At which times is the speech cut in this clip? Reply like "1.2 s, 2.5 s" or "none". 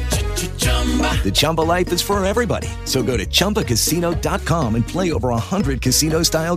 none